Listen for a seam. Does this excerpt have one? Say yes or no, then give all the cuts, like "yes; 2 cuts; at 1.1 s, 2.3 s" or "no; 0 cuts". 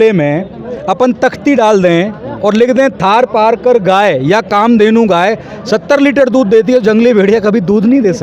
no; 0 cuts